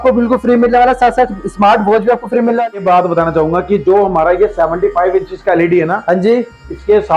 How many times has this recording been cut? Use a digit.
1